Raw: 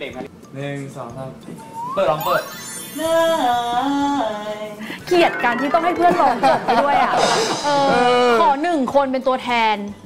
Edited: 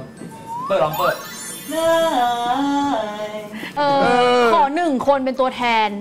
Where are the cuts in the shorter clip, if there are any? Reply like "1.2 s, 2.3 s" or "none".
3.7 s